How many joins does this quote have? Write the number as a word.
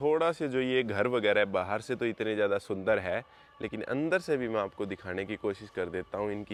zero